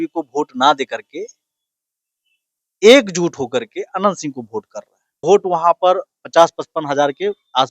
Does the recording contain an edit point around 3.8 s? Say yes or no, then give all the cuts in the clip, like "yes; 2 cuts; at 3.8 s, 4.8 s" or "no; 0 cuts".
no; 1 cut; at 5.2 s